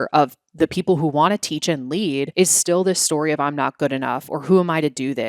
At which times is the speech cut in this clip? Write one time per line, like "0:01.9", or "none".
0:02.3

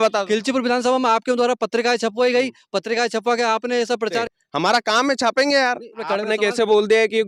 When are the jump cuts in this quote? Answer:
0:04.3
0:06.0

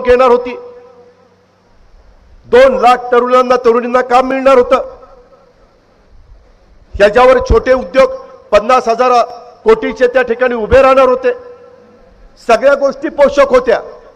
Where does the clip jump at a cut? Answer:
none

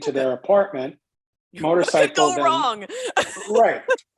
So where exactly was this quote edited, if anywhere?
none

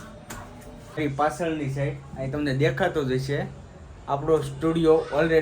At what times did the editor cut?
0:01.0

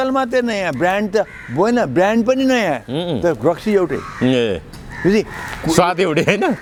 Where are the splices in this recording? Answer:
none

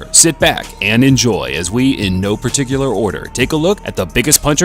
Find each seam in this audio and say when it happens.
0:01.4

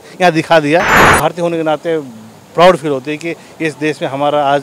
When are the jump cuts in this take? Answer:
0:01.0

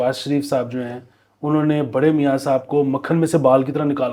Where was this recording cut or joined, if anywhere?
none

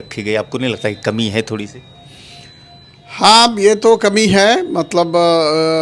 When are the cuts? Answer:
none

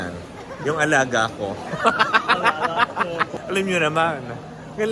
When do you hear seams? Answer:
0:03.3

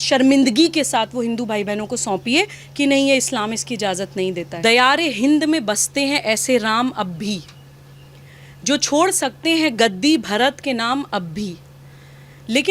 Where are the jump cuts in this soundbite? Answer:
0:04.5

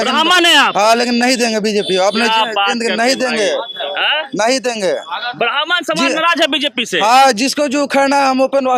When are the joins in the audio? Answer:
none

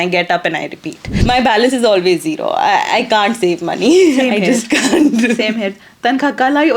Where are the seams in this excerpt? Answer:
0:01.2

